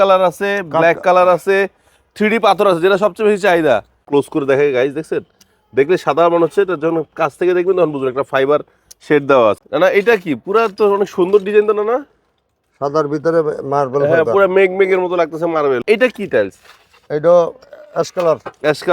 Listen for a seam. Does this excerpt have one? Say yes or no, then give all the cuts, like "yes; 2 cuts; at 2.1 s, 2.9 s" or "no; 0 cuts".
yes; 3 cuts; at 4.0 s, 9.6 s, 15.8 s